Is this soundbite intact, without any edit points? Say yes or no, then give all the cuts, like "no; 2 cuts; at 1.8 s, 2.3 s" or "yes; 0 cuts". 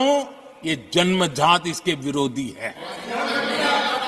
yes; 0 cuts